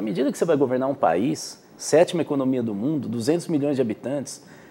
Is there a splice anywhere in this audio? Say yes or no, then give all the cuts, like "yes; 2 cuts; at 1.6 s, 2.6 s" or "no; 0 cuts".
no; 0 cuts